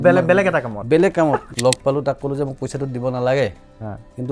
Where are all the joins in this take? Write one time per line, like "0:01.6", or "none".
0:01.5